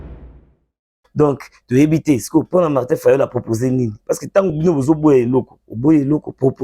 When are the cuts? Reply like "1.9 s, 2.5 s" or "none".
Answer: 0.9 s